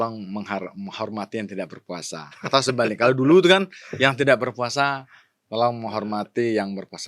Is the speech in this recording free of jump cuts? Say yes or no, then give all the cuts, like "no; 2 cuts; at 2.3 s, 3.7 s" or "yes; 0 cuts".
yes; 0 cuts